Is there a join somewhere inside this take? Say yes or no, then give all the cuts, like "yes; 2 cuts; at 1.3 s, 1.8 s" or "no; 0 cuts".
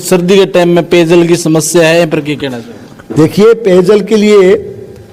no; 0 cuts